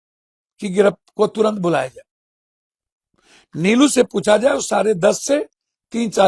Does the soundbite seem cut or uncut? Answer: uncut